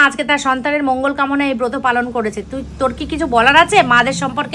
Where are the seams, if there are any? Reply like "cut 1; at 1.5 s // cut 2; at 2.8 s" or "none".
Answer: none